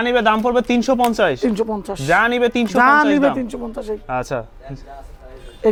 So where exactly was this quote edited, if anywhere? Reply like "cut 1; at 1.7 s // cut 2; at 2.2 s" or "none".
none